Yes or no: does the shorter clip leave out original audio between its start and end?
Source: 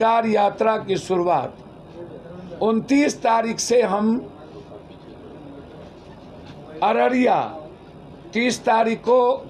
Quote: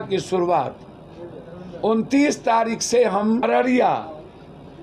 yes